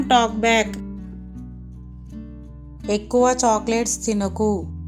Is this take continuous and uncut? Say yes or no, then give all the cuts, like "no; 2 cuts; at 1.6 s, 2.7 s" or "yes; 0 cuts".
no; 2 cuts; at 1.2 s, 2.9 s